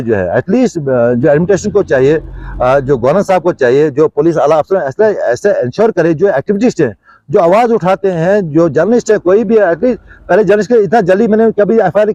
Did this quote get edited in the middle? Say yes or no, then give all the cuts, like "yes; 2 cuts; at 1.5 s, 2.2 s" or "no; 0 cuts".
no; 0 cuts